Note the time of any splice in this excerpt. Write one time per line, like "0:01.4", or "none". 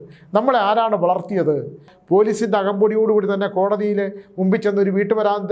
0:01.9